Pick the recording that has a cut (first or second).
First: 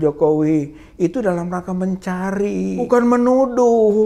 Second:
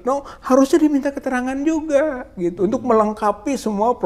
first